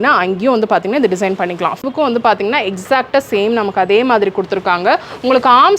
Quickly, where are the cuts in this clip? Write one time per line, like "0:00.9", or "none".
0:01.8